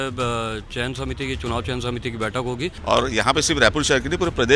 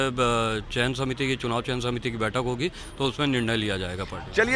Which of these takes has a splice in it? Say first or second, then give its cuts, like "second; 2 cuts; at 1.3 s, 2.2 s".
first; 1 cut; at 2.7 s